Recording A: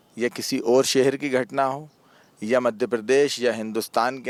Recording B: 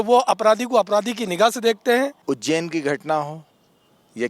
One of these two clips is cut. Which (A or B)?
B